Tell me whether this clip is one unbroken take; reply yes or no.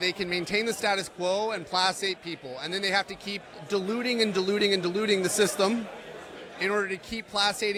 yes